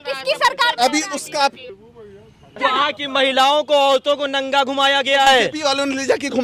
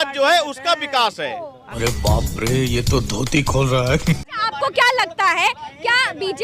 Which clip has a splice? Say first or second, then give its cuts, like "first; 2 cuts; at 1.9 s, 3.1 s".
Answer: second; 2 cuts; at 1.8 s, 4.2 s